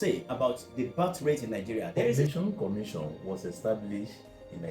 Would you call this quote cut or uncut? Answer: cut